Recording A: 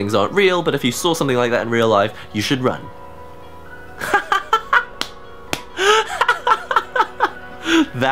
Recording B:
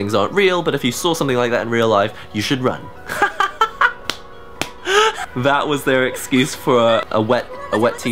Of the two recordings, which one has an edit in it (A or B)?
B